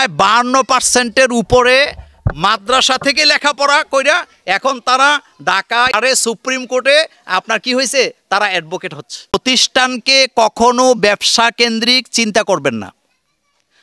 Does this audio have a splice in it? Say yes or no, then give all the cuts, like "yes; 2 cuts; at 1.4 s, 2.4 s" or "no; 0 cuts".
yes; 2 cuts; at 5.9 s, 9.3 s